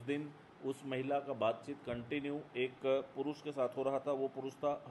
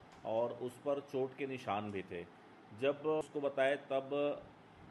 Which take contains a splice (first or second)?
second